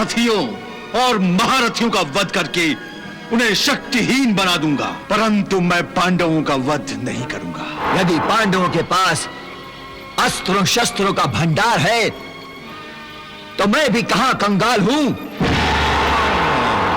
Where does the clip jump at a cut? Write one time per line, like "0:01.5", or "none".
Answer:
0:05.0
0:07.8